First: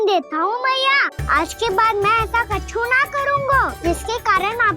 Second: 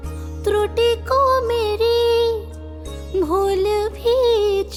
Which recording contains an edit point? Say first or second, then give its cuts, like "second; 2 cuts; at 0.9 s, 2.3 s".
first; 2 cuts; at 1.1 s, 3.7 s